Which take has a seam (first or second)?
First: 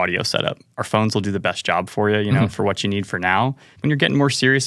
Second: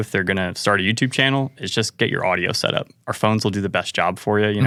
first